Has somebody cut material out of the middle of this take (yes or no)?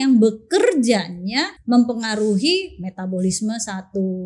yes